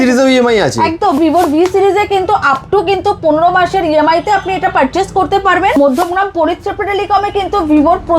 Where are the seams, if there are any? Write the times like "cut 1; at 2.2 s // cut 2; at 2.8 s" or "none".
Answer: cut 1; at 1.2 s // cut 2; at 5.8 s